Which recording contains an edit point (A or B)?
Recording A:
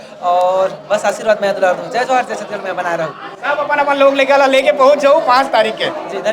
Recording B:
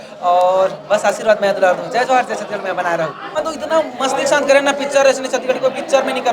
B